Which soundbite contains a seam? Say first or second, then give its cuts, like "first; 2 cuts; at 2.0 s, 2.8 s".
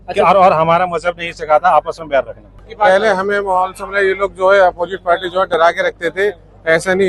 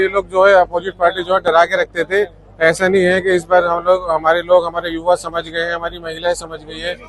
first; 1 cut; at 2.6 s